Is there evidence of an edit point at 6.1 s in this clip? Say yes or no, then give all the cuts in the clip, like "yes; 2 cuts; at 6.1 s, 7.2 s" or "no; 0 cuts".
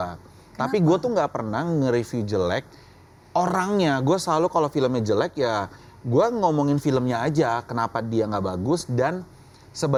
no; 0 cuts